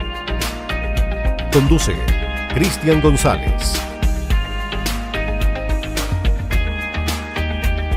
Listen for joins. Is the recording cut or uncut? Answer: uncut